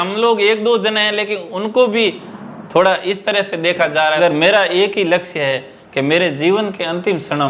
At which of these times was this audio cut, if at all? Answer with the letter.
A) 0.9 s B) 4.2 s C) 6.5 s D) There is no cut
B